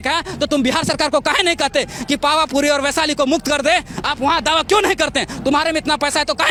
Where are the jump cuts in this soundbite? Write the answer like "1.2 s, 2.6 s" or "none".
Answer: none